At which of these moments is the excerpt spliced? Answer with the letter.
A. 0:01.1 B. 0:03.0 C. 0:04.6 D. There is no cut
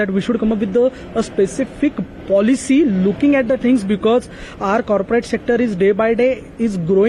D